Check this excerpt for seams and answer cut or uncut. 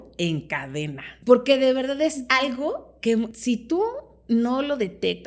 cut